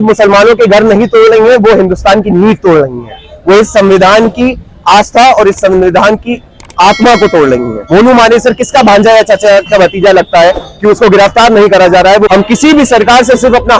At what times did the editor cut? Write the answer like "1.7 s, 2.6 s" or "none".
7.7 s, 12.3 s